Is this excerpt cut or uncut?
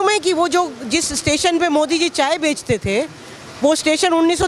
uncut